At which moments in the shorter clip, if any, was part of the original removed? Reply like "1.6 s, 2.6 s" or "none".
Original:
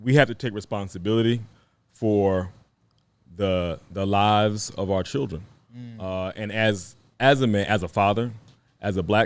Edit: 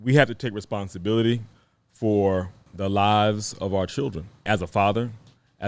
2.7 s, 4.4 s